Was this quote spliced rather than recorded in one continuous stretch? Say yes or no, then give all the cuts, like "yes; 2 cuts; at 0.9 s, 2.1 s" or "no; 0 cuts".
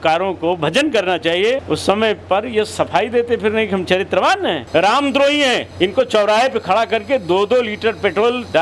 yes; 1 cut; at 4.7 s